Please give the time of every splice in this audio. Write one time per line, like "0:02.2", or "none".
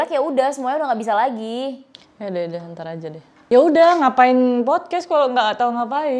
0:03.3

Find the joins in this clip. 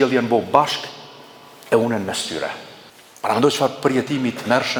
none

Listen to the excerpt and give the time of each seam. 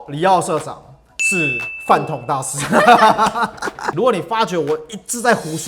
0:03.7

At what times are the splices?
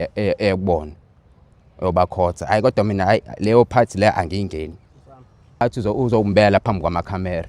0:05.6

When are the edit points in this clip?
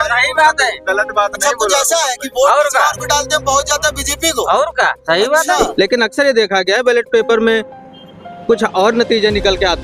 0:05.7

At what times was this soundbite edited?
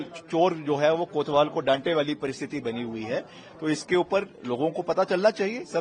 none

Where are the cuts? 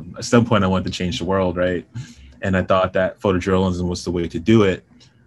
none

